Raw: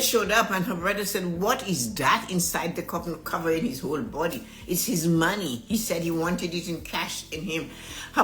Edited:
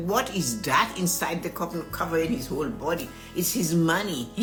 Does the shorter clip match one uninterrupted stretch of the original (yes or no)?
yes